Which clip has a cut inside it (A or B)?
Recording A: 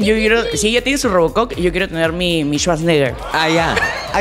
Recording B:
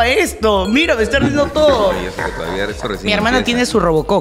B